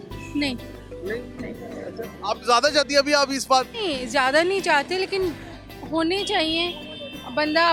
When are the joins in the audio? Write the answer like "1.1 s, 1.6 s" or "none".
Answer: none